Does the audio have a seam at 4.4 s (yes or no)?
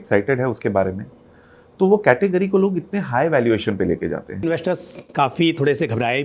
yes